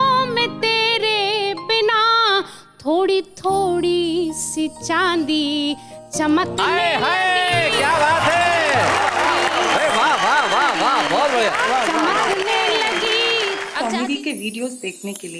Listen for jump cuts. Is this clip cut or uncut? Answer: cut